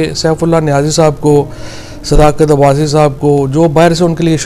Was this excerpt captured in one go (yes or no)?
yes